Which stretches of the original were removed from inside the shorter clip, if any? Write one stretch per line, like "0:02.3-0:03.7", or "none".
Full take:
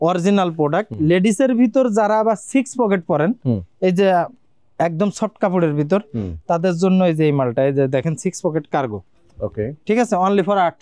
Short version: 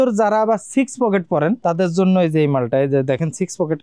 0:03.4-0:06.4